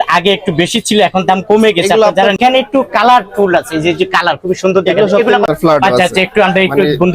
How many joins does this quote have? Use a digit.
2